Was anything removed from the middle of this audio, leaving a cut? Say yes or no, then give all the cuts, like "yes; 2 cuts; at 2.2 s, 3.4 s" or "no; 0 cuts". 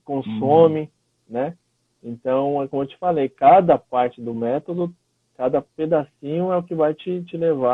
no; 0 cuts